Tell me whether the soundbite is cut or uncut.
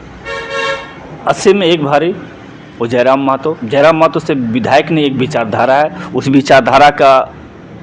uncut